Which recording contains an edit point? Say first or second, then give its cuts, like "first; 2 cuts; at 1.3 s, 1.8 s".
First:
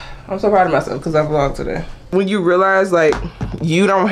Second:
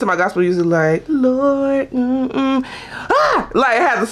first; 1 cut; at 2.1 s